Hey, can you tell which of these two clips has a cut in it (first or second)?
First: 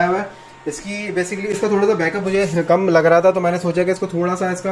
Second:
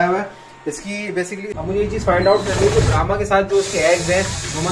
second